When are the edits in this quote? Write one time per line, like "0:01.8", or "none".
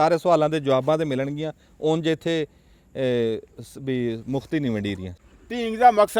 0:05.1